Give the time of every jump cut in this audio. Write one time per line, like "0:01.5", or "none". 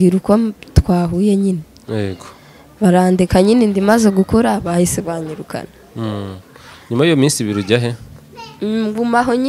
0:06.6